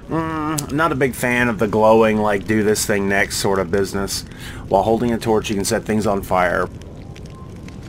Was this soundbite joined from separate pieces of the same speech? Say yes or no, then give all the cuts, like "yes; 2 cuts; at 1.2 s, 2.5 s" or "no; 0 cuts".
yes; 1 cut; at 6.7 s